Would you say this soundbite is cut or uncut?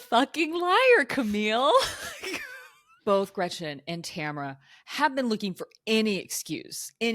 cut